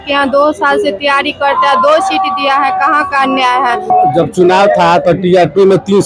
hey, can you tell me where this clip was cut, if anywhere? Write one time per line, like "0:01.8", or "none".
0:03.9